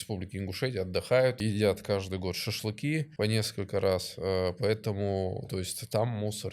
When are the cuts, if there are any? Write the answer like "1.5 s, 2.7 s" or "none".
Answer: 1.4 s, 3.1 s